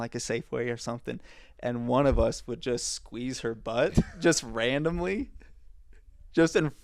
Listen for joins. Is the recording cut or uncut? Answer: uncut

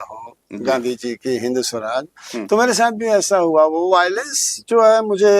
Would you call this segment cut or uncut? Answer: uncut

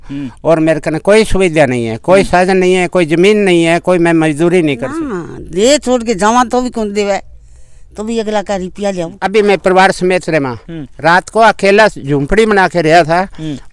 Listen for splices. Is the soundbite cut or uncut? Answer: cut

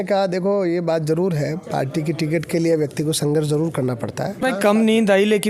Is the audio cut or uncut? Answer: cut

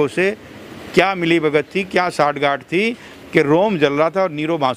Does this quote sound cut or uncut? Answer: uncut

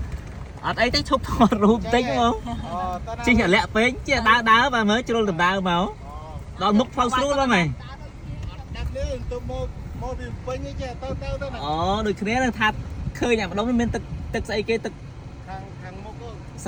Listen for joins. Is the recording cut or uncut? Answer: uncut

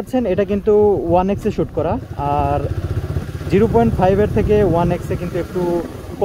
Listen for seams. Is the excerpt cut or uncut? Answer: uncut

